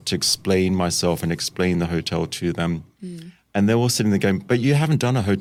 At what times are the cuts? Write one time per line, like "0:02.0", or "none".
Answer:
none